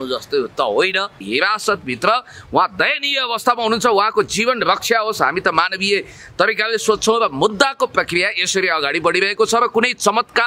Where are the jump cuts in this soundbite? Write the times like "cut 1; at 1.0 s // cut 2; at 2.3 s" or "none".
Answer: cut 1; at 1.2 s